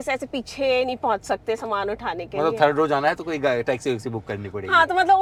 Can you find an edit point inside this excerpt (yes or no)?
no